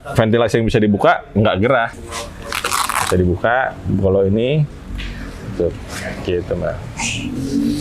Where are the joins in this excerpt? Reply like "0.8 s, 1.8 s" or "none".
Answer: 1.9 s